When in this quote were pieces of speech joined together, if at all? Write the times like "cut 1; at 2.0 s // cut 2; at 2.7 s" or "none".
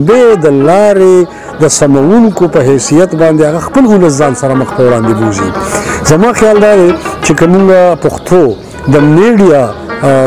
none